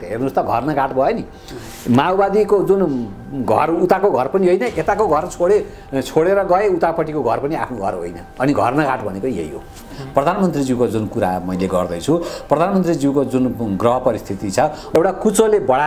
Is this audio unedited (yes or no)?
no